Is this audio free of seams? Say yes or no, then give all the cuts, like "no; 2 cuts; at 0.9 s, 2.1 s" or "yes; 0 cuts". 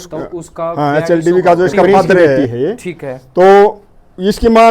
no; 1 cut; at 2.5 s